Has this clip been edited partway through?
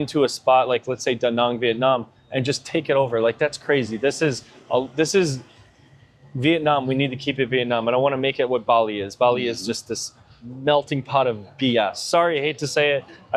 no; 0 cuts

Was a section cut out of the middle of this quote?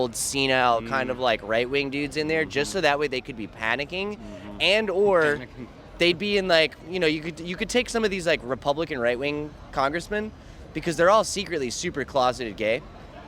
no; 0 cuts

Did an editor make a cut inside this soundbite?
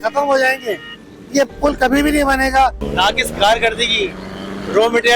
yes; 1 cut; at 3.0 s

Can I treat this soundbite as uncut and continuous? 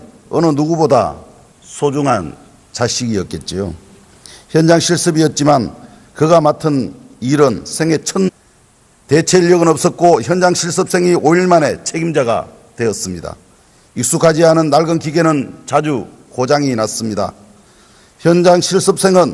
yes; 0 cuts

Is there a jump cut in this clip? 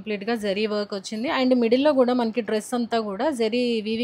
no; 0 cuts

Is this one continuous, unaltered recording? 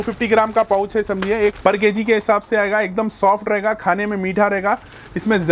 no; 1 cut; at 1.6 s

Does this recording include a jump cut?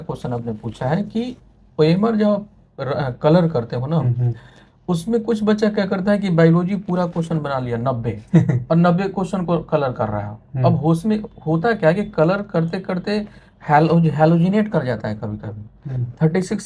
no; 0 cuts

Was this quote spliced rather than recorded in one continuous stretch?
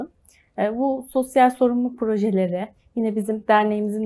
no; 0 cuts

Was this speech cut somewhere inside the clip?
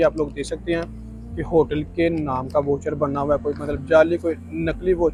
no; 0 cuts

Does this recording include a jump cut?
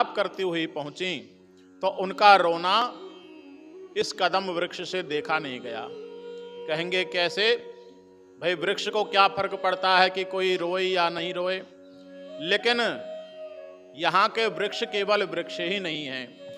no; 0 cuts

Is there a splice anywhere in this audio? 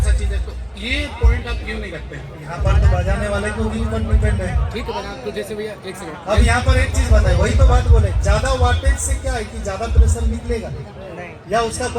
no; 0 cuts

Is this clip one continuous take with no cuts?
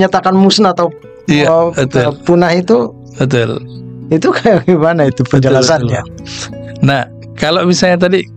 yes; 0 cuts

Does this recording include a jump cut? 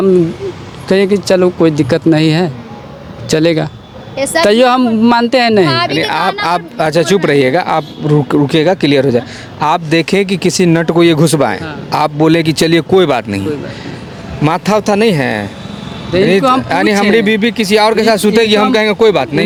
no; 0 cuts

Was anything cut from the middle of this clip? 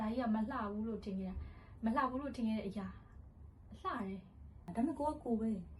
yes; 1 cut; at 4.7 s

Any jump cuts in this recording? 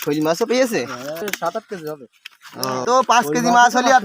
yes; 2 cuts; at 1.2 s, 2.9 s

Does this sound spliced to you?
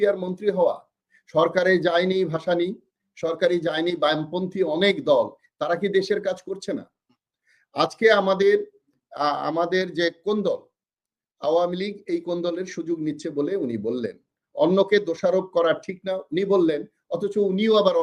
no; 0 cuts

